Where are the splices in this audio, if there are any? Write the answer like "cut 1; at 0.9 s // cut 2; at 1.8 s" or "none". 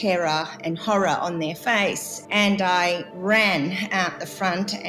cut 1; at 2.1 s // cut 2; at 3.1 s